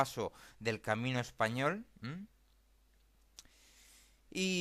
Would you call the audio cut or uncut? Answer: uncut